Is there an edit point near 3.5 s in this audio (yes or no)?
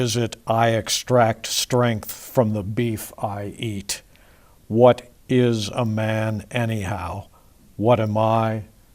yes